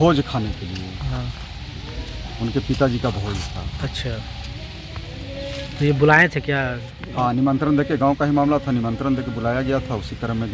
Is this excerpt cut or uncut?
uncut